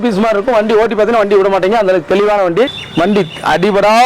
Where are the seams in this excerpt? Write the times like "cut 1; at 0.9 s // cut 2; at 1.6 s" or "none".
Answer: cut 1; at 2.8 s